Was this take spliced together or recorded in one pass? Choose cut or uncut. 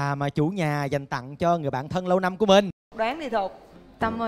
cut